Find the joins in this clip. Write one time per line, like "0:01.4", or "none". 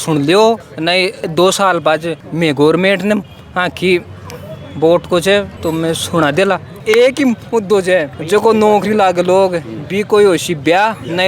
0:01.2
0:06.8

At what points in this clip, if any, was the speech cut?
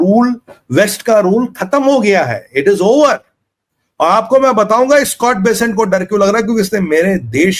none

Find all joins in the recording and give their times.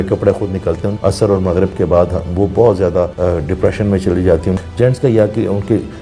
0:00.9
0:03.1
0:04.6

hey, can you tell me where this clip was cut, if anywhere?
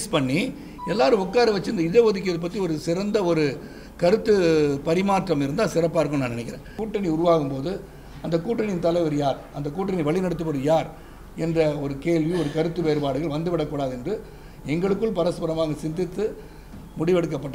0:06.8

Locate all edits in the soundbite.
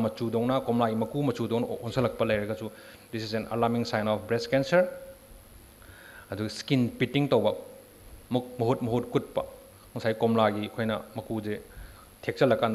none

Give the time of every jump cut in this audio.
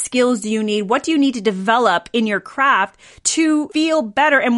0:03.4

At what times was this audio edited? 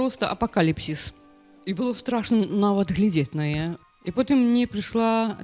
0:03.8

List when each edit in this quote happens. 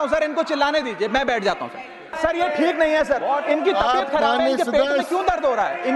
0:02.2

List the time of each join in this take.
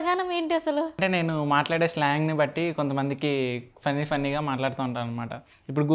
0:01.0

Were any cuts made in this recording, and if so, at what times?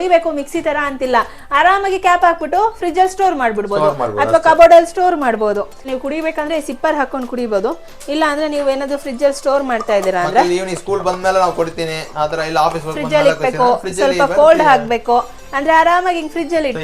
0:05.9

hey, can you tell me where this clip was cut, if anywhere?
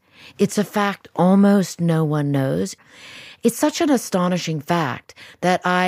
0:02.7

